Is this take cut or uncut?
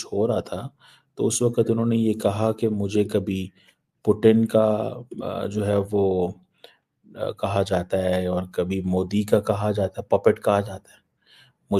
uncut